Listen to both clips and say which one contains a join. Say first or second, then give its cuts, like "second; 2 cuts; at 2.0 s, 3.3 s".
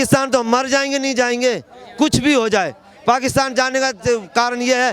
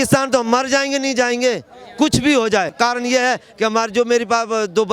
second; 1 cut; at 2.7 s